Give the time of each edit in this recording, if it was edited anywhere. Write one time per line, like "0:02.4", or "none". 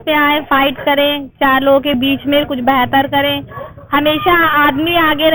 none

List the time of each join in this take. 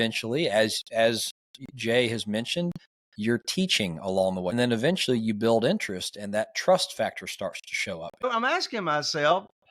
0:04.5
0:08.2

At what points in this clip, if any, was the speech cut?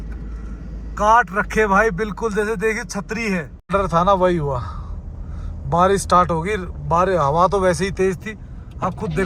0:03.6

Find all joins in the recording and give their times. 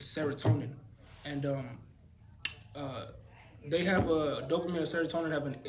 none

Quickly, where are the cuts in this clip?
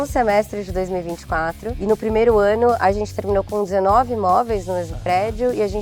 0:01.8

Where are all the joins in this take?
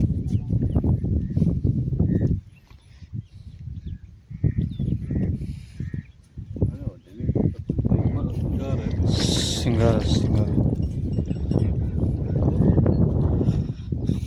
none

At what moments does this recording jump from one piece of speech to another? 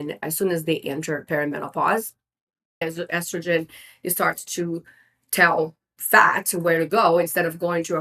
0:02.8

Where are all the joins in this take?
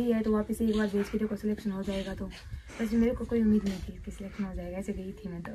none

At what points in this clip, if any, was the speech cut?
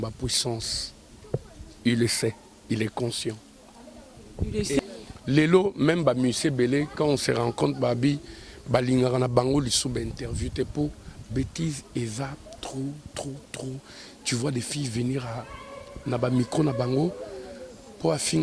0:04.8

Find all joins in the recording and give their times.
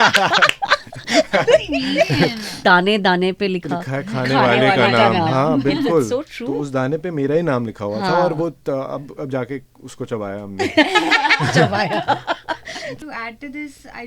0:02.5
0:12.9

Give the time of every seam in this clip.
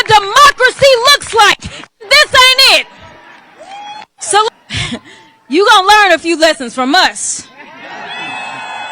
0:04.5

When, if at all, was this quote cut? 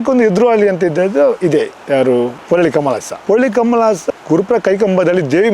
none

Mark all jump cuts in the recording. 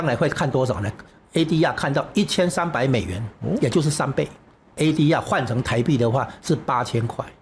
0:04.8

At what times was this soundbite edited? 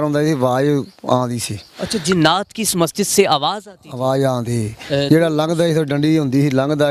none

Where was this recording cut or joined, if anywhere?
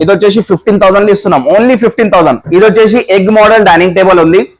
0:02.4

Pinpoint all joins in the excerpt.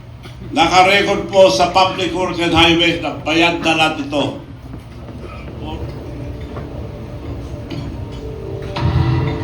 0:05.3

